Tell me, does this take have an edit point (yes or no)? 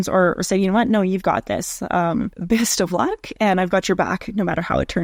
no